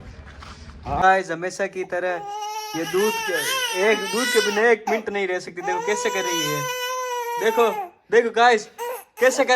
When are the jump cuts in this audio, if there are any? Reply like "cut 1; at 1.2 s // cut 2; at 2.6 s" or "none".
cut 1; at 1.0 s